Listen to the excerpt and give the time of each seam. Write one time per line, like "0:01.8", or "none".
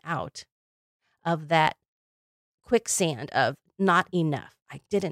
none